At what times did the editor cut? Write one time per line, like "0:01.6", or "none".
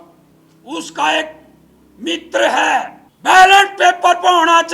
0:03.0